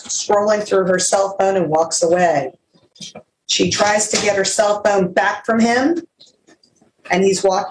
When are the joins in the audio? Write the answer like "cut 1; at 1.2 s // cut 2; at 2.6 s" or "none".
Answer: none